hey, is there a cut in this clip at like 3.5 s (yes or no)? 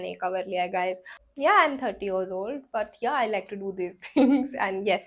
no